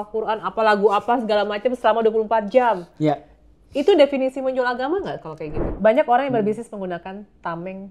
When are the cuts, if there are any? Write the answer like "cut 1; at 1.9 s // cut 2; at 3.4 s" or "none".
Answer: cut 1; at 5.6 s